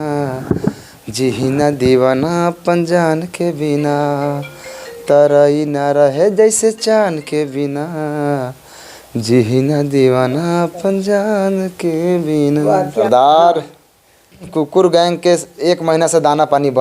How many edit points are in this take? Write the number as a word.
two